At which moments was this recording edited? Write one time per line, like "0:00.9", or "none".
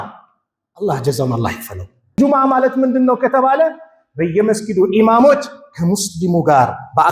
0:02.2